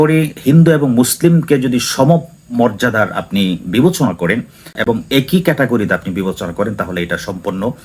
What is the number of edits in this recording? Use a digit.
0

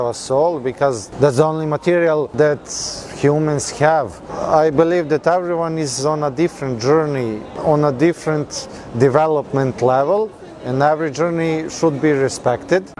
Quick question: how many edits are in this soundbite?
4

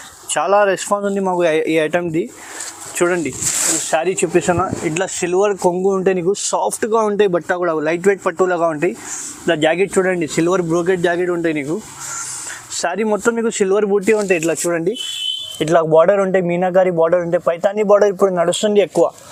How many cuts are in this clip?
0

